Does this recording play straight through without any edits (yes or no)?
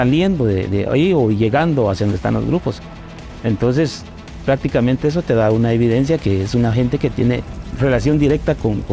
no